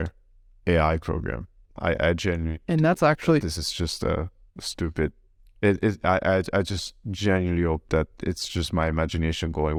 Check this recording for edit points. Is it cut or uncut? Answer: uncut